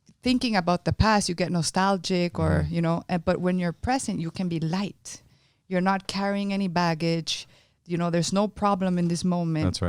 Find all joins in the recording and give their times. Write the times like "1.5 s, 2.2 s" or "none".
none